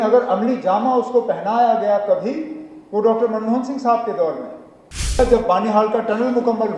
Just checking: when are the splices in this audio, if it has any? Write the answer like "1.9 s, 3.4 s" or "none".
5.2 s